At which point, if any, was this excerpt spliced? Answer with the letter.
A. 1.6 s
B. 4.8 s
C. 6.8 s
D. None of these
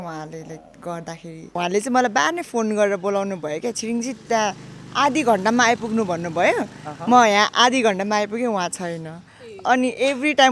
A